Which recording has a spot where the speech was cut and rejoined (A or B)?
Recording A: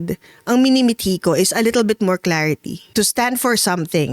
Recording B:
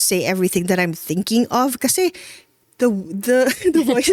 A